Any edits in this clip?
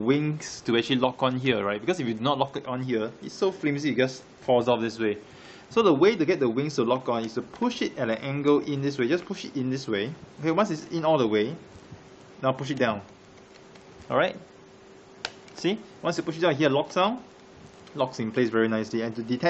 no; 0 cuts

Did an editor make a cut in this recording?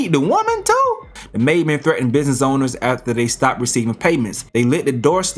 yes; 1 cut; at 1.2 s

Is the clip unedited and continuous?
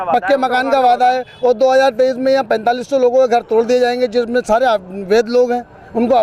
yes; 0 cuts

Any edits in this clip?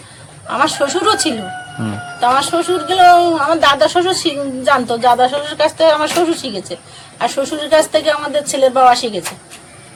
no; 0 cuts

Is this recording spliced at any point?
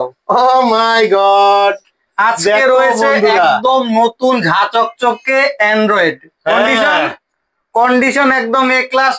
no; 0 cuts

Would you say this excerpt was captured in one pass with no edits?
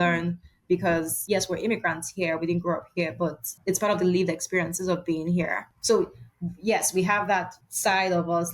no; 4 cuts; at 1.2 s, 3.5 s, 5.7 s, 7.6 s

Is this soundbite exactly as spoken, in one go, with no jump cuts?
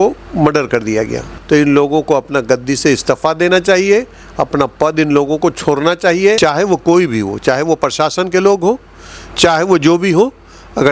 no; 2 cuts; at 1.3 s, 6.4 s

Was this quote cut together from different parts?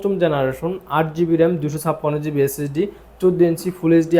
no; 0 cuts

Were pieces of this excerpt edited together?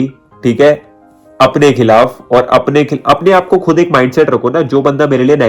no; 0 cuts

